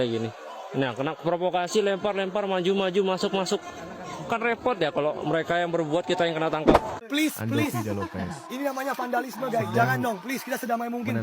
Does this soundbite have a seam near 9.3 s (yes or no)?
no